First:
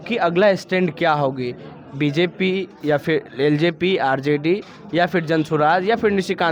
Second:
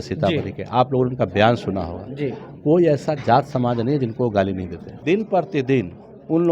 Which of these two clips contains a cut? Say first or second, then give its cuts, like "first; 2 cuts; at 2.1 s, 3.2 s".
second; 1 cut; at 4.9 s